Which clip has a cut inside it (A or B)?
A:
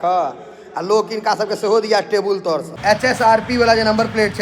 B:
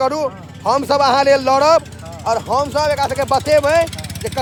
A